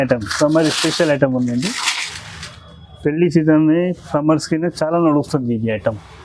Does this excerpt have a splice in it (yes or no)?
no